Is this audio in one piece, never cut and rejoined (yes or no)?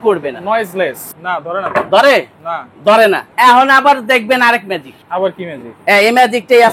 no